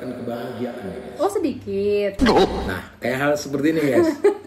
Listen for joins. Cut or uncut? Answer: uncut